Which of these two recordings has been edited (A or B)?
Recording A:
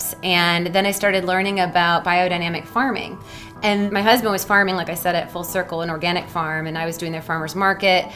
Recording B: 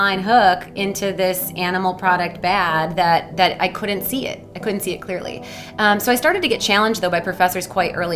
A